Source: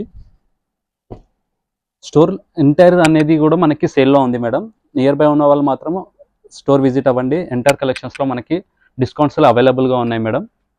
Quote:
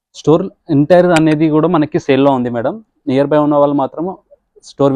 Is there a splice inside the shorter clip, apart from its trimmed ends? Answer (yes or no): no